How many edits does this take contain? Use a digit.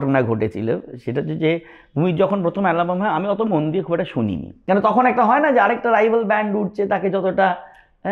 1